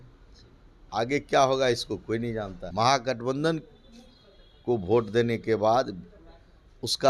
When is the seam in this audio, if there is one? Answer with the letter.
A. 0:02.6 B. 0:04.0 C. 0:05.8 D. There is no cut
A